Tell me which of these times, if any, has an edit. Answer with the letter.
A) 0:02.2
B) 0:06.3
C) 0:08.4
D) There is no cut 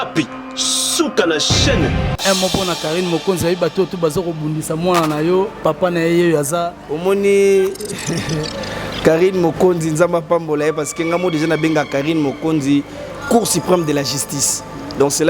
A